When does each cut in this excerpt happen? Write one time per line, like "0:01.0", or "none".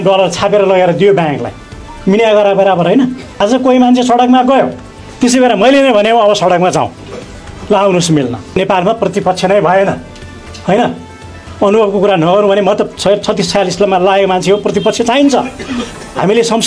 0:03.3
0:08.6